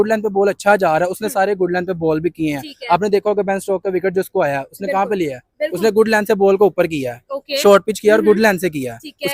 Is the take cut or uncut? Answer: uncut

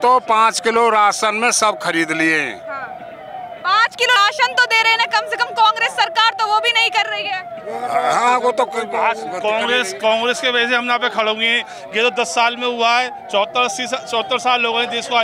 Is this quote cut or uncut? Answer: uncut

